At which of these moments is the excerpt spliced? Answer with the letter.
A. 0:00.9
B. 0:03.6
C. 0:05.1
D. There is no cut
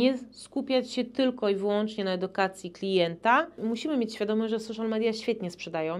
B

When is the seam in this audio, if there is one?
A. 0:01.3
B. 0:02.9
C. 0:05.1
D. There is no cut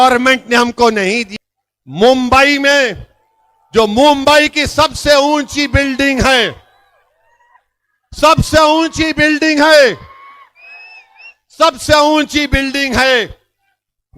A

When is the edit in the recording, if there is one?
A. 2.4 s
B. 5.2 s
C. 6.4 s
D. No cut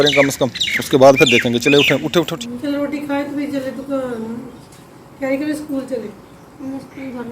A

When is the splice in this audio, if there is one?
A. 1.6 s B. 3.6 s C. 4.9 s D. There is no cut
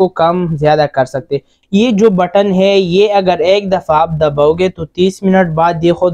A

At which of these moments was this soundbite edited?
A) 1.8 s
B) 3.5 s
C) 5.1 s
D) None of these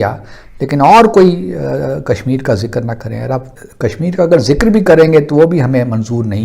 B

